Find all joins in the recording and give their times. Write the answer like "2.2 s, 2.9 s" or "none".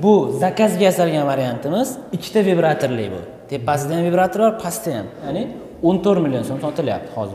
5.3 s